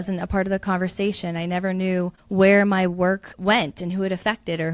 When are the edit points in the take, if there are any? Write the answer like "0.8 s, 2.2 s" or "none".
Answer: 2.2 s, 3.3 s